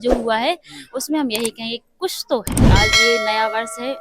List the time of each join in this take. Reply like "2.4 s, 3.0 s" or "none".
2.7 s